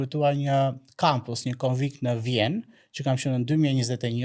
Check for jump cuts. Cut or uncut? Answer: uncut